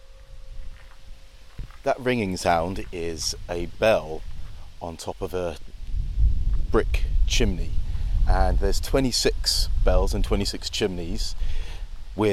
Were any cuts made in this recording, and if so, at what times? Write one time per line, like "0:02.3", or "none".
none